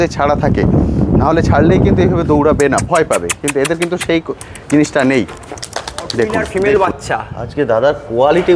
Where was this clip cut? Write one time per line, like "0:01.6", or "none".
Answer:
0:06.4